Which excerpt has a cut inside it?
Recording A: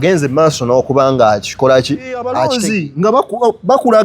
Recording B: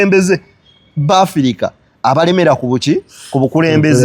A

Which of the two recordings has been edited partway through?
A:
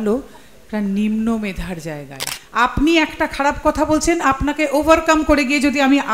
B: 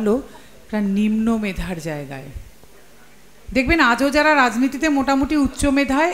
A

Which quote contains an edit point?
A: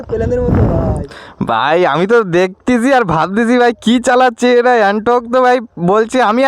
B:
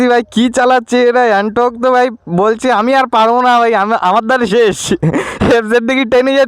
A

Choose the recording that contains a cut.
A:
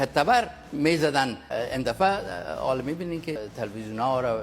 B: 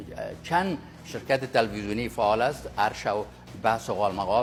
A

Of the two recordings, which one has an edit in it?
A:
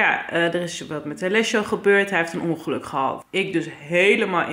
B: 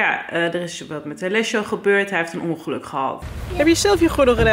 B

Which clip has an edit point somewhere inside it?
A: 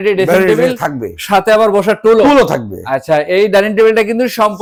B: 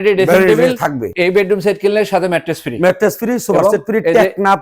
B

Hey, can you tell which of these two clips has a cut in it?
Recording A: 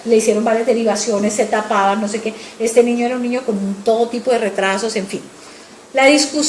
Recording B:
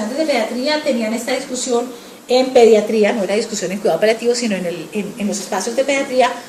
A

